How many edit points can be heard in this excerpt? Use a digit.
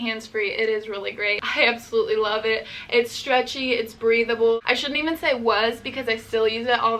2